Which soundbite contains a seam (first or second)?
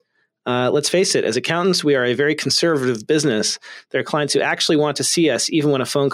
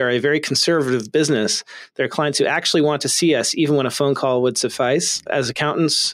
second